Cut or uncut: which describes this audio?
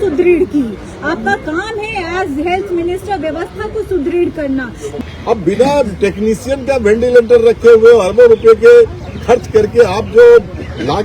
cut